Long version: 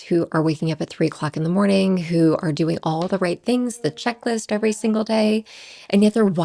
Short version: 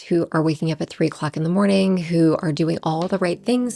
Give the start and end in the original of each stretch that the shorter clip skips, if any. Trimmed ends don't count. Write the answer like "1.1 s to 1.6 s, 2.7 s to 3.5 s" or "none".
none